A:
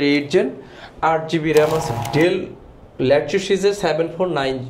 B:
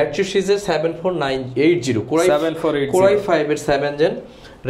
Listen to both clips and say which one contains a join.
A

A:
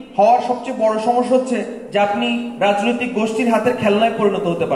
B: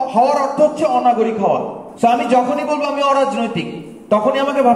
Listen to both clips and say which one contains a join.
B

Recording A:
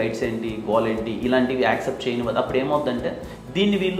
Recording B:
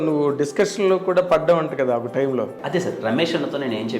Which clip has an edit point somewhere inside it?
B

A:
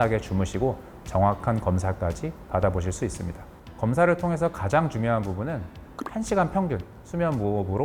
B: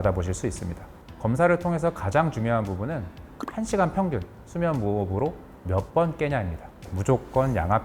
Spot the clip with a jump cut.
B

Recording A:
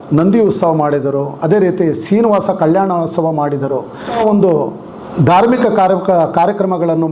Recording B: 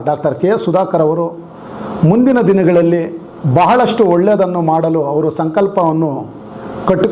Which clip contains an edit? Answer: A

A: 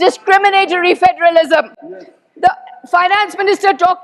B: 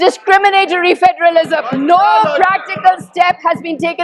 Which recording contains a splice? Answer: B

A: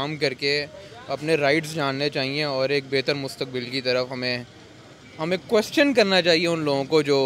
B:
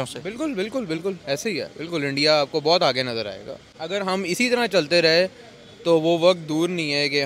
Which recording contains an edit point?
B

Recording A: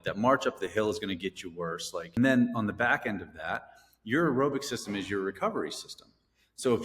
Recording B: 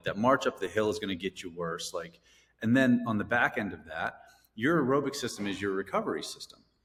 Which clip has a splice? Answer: A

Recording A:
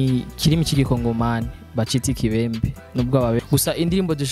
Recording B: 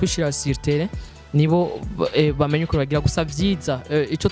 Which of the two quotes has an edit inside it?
A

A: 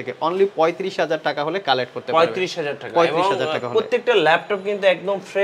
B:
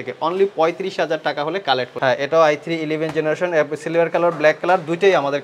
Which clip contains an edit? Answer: B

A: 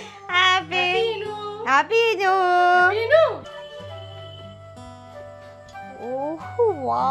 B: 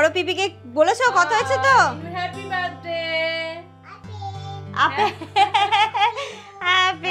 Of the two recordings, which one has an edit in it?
A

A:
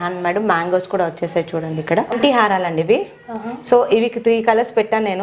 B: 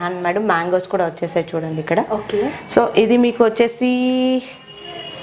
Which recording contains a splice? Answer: A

